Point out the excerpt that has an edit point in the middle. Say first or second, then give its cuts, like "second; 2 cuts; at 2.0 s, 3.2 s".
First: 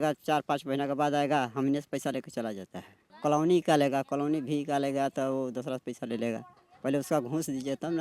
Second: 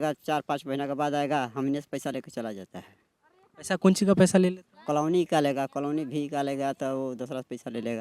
first; 1 cut; at 3.1 s